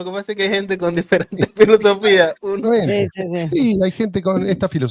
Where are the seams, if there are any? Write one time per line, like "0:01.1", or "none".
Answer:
none